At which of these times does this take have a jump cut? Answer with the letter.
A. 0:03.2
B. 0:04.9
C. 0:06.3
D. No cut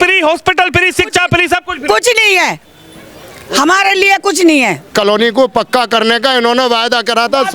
B